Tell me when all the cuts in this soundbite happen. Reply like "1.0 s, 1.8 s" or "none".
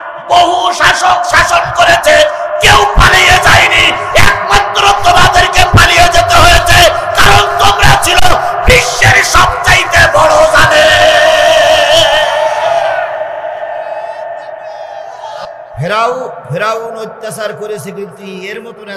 15.8 s